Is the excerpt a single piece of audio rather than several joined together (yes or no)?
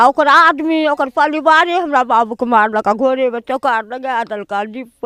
yes